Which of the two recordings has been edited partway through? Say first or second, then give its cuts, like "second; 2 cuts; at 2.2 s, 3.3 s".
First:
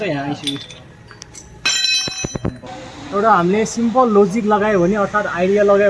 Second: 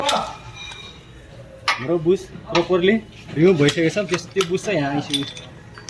first; 1 cut; at 2.7 s